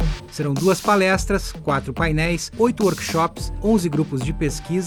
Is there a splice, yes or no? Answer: no